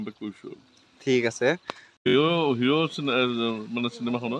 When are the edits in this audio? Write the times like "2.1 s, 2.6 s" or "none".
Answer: 2.0 s